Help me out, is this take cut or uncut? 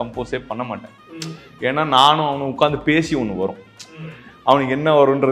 uncut